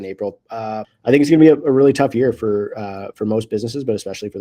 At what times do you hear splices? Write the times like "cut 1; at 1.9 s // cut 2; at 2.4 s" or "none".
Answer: cut 1; at 0.9 s